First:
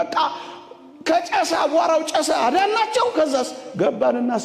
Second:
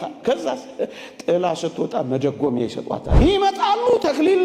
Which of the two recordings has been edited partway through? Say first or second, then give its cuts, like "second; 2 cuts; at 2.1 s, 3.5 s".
second; 1 cut; at 3.1 s